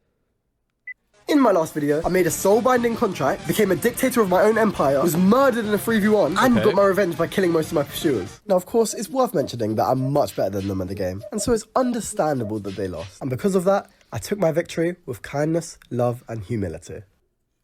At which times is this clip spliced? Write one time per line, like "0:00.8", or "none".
0:06.2
0:09.3
0:12.2